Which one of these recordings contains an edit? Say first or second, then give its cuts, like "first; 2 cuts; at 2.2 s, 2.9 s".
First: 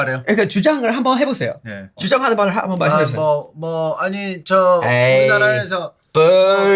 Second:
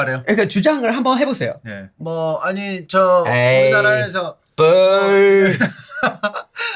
second; 1 cut; at 1.9 s